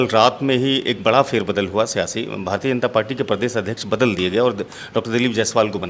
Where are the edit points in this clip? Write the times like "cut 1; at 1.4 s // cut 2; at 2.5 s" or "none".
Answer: none